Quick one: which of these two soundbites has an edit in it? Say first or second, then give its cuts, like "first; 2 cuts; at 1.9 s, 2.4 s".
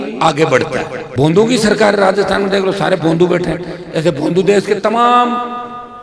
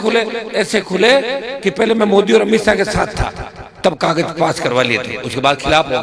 first; 1 cut; at 1.0 s